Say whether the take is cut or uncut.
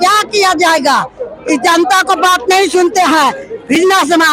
uncut